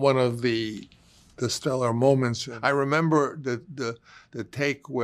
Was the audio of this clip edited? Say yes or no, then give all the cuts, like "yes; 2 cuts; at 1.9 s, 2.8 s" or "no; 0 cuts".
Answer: yes; 1 cut; at 2.5 s